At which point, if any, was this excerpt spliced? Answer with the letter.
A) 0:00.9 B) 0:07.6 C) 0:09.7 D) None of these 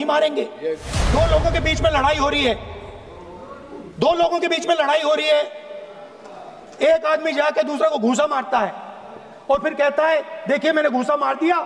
A